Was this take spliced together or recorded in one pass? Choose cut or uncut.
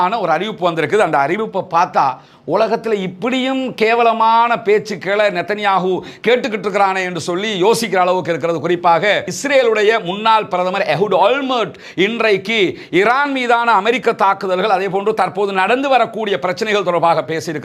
uncut